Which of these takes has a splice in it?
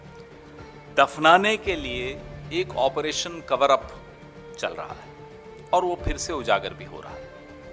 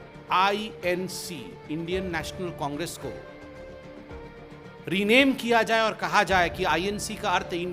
first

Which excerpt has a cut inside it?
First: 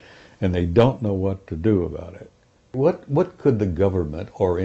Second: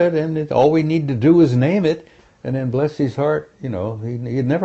first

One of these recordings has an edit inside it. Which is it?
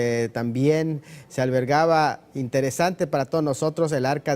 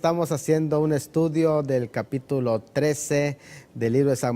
second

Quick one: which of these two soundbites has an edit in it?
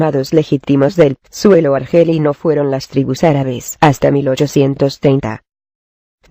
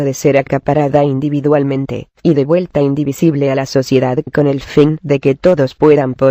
second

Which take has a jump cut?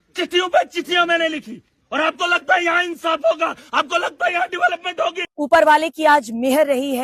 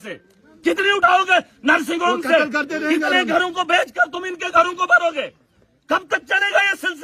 first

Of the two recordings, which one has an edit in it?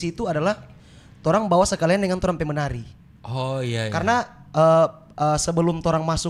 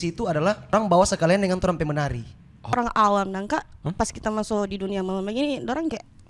second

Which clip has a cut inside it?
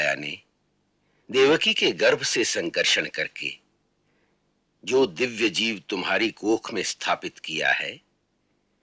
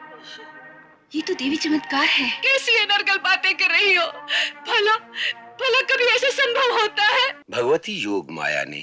second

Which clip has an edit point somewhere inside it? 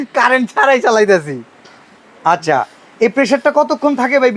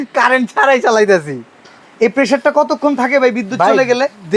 second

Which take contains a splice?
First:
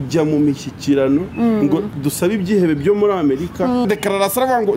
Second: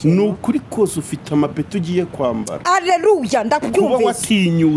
first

